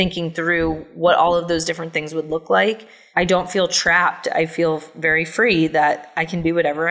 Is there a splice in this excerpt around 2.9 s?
yes; 2 cuts; at 0.9 s, 2.9 s

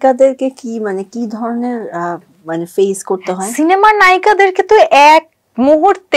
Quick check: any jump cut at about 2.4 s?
no; 0 cuts

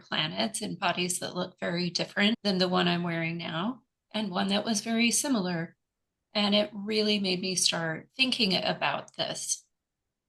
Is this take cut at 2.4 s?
yes; 2 cuts; at 2.4 s, 8.1 s

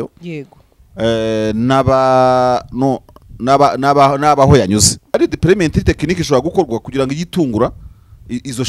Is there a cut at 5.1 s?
yes; 1 cut; at 5.1 s

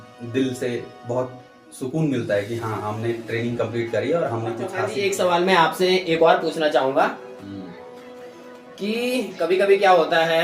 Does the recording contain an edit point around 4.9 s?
yes; 1 cut; at 4.9 s

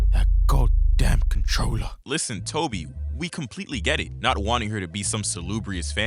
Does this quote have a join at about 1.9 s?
yes; 1 cut; at 1.9 s

